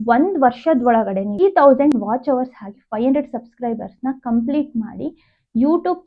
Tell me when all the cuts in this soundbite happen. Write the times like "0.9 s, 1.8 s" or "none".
1.4 s